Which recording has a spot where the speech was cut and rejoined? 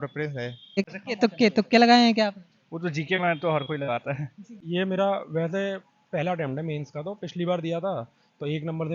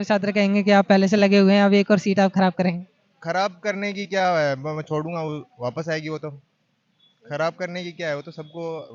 first; 2 cuts; at 0.9 s, 4.5 s

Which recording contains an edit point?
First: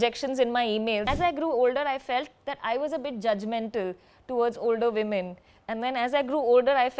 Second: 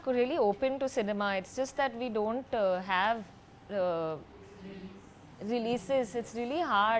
first; 1 cut; at 1.1 s

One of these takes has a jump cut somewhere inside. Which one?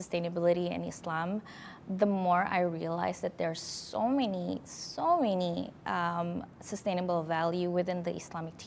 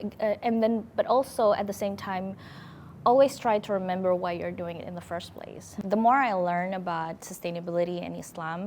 second; 1 cut; at 5.7 s

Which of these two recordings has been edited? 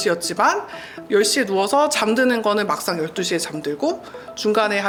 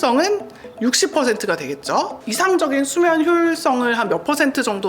second; 1 cut; at 2.2 s

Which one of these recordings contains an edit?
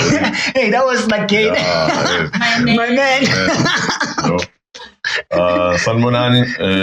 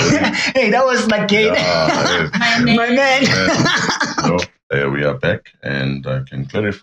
second; 1 cut; at 4.6 s

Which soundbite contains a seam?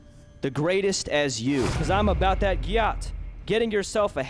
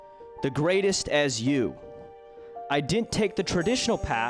first; 1 cut; at 1.8 s

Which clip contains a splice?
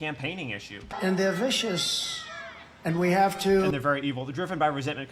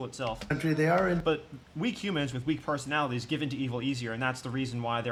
first; 1 cut; at 0.9 s

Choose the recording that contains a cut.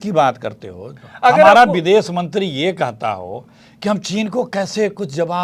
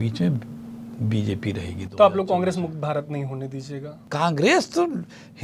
second; 1 cut; at 4.0 s

